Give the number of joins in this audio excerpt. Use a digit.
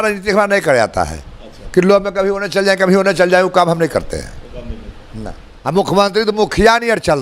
1